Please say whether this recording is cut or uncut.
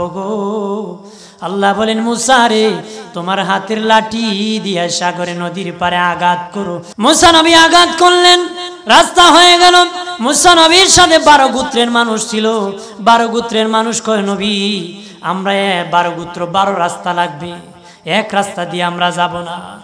cut